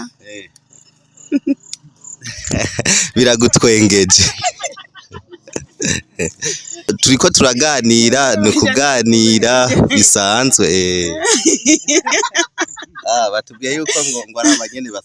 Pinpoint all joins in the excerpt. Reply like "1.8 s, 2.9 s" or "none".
6.9 s